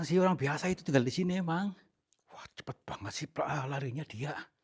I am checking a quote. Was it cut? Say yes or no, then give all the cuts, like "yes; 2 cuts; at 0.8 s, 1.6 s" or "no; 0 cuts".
no; 0 cuts